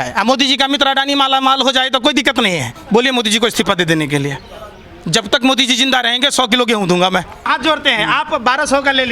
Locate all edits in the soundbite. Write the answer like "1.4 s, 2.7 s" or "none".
2.7 s, 7.5 s

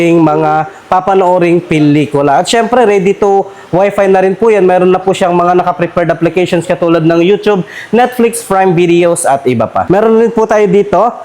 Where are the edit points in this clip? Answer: 9.8 s

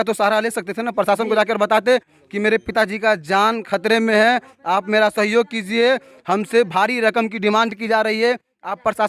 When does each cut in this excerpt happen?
none

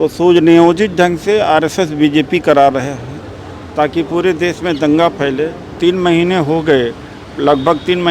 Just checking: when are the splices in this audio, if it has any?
5.7 s

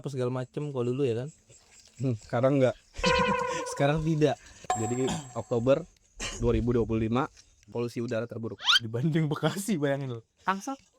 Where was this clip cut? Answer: 4.5 s, 7.6 s

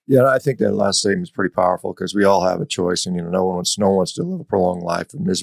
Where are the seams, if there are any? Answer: none

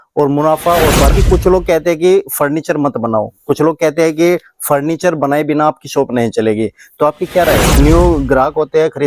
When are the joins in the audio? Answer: 1.1 s, 7.7 s

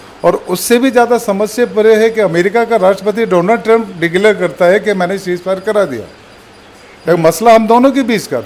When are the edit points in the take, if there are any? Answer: none

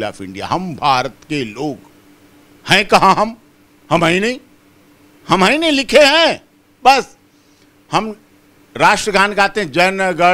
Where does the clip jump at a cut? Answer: none

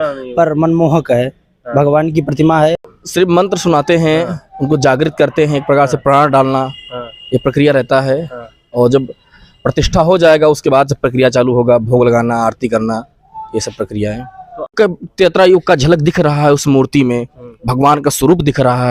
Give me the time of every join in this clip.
2.8 s, 14.7 s

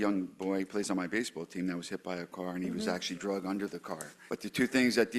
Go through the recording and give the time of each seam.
4.2 s

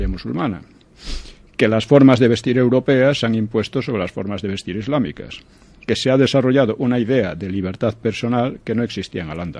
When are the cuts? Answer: 4.0 s

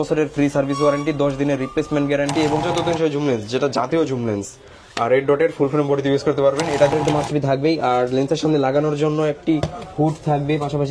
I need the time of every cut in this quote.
2.6 s, 6.9 s

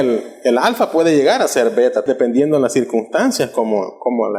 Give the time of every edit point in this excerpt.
2.1 s

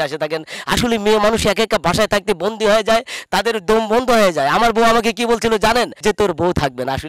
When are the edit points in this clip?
5.9 s

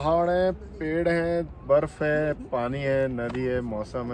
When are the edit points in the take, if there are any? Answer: none

